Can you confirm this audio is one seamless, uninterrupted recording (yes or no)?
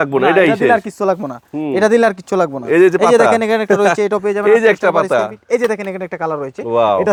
yes